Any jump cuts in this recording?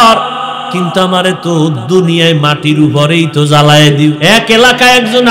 yes; 1 cut; at 4.2 s

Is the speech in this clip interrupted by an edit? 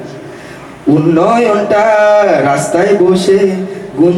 no; 0 cuts

